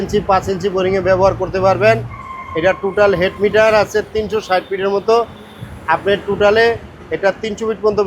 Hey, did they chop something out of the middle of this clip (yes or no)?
no